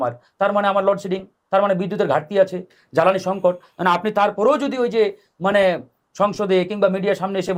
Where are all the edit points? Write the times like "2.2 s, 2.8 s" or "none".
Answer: none